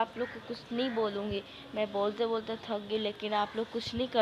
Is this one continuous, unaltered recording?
yes; 0 cuts

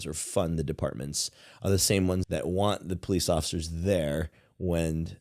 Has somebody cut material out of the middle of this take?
yes; 1 cut; at 2.2 s

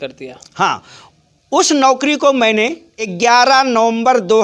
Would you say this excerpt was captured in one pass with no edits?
no; 1 cut; at 3.0 s

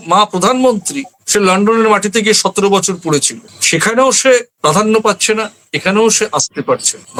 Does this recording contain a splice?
no; 0 cuts

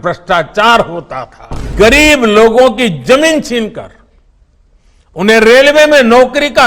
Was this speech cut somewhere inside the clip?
yes; 1 cut; at 1.7 s

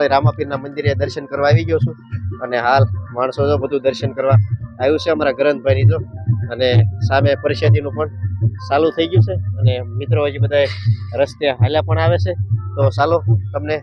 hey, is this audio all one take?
yes; 0 cuts

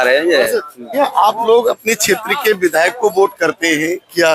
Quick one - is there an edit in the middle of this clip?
yes; 1 cut; at 0.9 s

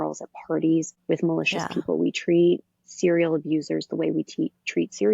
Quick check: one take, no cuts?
no; 1 cut; at 0.9 s

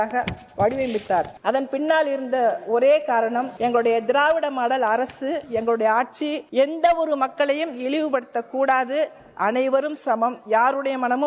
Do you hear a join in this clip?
yes; 3 cuts; at 1.3 s, 3.5 s, 6.4 s

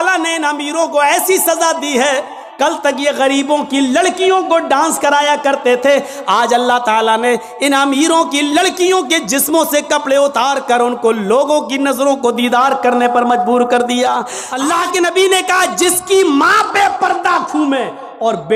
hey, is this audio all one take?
no; 2 cuts; at 2.4 s, 14.4 s

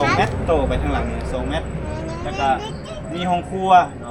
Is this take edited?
no; 0 cuts

